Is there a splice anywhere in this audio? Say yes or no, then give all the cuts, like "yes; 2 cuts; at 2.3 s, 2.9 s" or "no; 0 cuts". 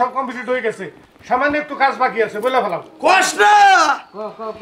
no; 0 cuts